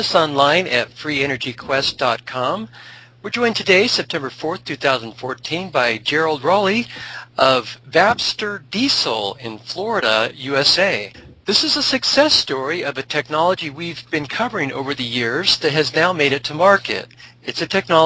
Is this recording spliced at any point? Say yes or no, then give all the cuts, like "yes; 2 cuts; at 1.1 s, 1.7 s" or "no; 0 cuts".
no; 0 cuts